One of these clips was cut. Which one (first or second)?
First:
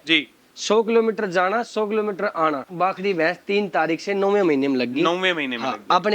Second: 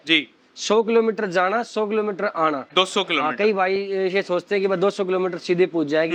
first